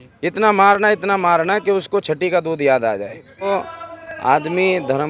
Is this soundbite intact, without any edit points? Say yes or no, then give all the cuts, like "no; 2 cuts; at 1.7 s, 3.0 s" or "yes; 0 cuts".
no; 1 cut; at 3.5 s